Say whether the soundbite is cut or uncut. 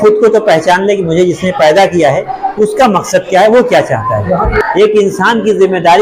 cut